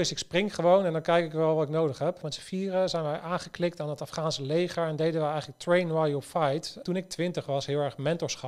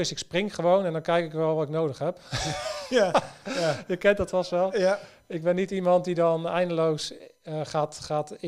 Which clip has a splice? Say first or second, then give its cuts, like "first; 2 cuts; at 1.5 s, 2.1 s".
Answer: first; 2 cuts; at 2.3 s, 6.8 s